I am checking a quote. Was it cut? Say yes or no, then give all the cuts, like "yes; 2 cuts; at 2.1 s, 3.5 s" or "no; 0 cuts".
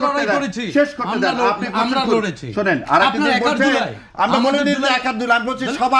no; 0 cuts